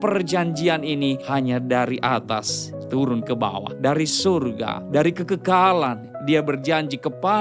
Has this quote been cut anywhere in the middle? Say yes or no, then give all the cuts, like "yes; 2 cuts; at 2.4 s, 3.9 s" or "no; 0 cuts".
yes; 3 cuts; at 1.2 s, 3.7 s, 4.8 s